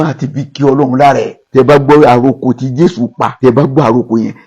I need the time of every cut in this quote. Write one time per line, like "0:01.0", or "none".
0:01.5